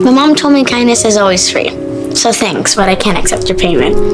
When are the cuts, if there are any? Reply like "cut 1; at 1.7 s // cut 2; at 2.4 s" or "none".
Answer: none